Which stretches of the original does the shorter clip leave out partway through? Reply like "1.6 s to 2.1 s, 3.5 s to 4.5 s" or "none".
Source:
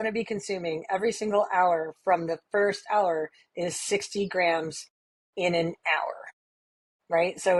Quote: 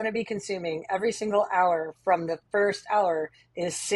none